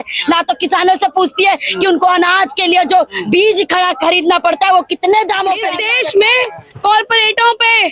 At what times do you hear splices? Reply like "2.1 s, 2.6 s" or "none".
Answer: 5.7 s